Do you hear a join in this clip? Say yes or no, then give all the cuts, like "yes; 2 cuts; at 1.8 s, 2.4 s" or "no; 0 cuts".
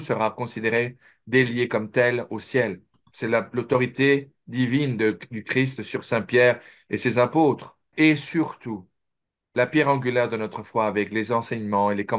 yes; 1 cut; at 7.9 s